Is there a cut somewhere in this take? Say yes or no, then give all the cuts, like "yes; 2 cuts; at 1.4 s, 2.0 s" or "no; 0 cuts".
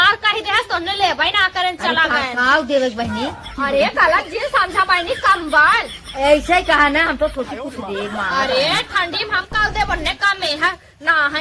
no; 0 cuts